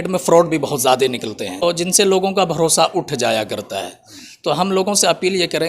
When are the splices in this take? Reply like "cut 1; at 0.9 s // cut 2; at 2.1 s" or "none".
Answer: cut 1; at 1.6 s